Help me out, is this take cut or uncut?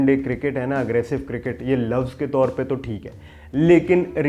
uncut